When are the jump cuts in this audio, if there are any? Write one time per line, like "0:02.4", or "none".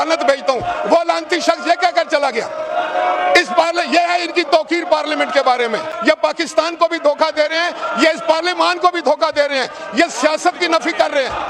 0:05.9